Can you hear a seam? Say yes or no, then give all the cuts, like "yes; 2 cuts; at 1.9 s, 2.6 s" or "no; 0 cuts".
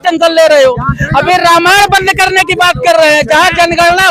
no; 0 cuts